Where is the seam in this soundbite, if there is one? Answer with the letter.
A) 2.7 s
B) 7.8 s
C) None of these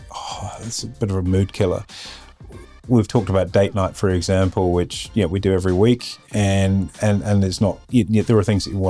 B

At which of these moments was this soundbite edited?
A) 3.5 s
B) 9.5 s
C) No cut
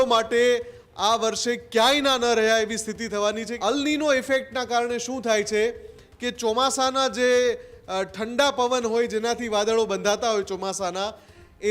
A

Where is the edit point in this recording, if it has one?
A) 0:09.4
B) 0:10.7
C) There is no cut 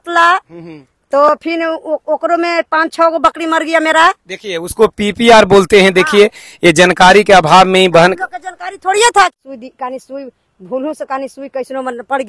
A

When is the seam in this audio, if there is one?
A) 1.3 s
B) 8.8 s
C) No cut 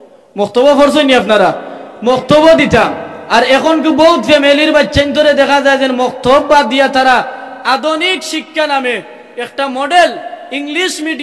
C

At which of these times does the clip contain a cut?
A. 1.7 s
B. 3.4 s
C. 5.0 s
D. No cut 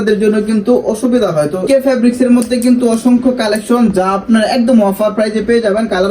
A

